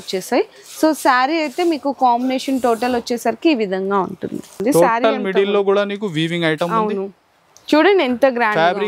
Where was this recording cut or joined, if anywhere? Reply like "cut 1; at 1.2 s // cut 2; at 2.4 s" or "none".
cut 1; at 4.5 s